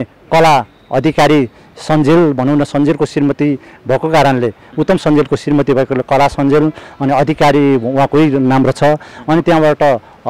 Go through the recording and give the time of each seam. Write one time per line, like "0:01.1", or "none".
none